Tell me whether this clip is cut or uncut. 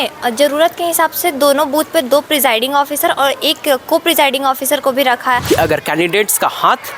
cut